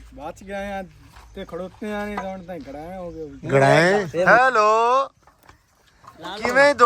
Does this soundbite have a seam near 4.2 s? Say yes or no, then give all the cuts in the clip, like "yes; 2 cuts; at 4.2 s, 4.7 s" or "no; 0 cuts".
yes; 1 cut; at 4.2 s